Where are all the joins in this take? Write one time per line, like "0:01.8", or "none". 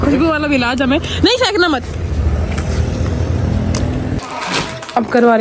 0:04.3

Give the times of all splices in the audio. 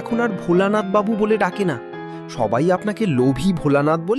none

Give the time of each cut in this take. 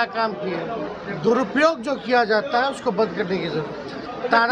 0:00.9

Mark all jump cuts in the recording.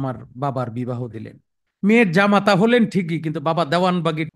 none

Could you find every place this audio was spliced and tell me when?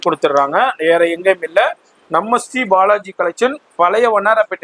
none

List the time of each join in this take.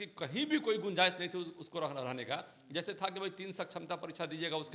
none

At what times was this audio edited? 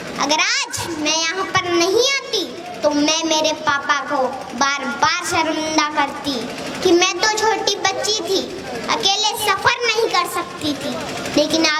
none

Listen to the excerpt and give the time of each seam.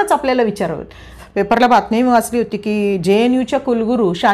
0:01.2

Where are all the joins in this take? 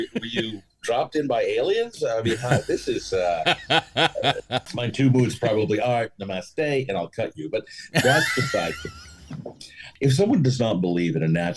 0:04.7
0:09.8

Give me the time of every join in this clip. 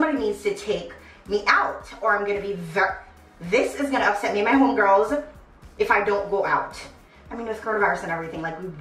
none

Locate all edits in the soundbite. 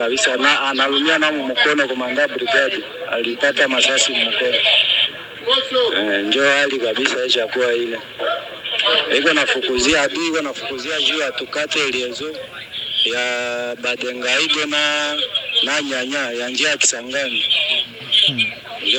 none

